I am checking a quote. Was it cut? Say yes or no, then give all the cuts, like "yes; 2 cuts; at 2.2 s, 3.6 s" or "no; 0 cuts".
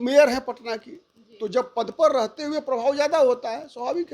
no; 0 cuts